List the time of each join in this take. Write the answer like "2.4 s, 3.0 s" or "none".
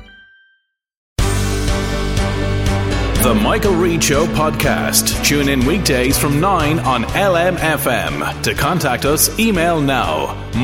1.1 s